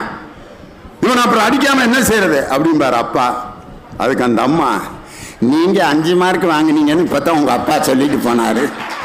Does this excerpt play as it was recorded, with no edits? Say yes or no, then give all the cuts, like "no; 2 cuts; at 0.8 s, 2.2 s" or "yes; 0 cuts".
yes; 0 cuts